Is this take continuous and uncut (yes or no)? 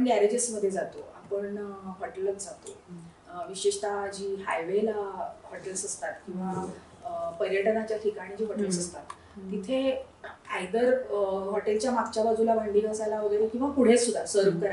yes